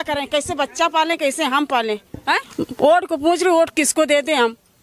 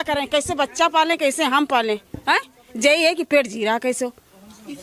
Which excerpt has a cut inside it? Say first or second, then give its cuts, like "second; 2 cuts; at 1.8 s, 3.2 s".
first; 1 cut; at 2.5 s